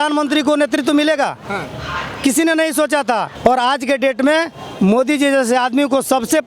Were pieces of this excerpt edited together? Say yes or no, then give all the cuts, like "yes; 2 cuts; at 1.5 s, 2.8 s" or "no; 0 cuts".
yes; 1 cut; at 3.3 s